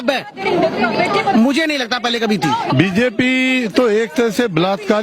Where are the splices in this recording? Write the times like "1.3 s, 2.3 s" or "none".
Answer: 2.7 s